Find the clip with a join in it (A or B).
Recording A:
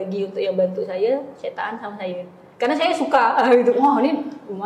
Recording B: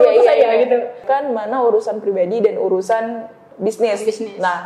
B